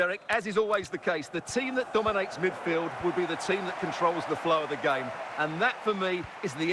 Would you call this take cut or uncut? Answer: uncut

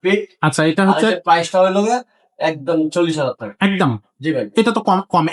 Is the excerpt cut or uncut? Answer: uncut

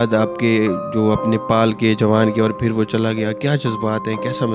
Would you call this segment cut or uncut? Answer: uncut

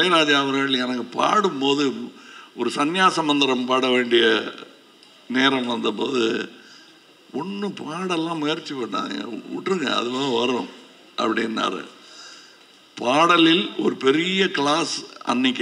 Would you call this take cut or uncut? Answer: uncut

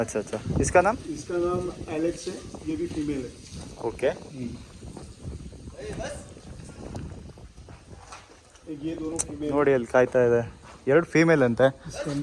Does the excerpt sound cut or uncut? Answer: uncut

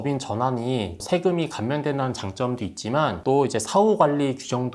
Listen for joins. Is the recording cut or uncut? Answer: cut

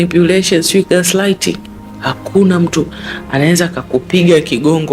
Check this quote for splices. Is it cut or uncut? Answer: uncut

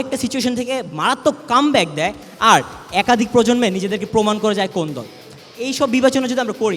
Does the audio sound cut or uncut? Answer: uncut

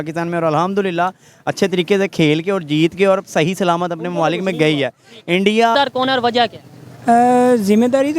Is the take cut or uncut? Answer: cut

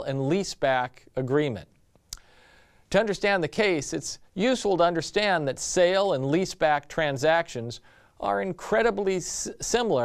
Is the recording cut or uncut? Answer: uncut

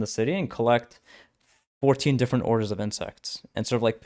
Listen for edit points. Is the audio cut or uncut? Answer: uncut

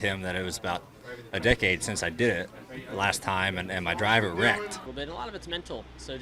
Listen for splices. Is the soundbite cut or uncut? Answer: cut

